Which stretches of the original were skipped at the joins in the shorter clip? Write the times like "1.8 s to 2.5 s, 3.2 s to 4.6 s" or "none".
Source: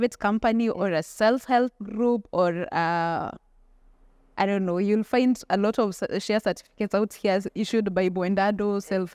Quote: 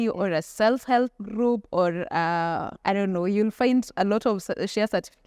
3.3 s to 4.2 s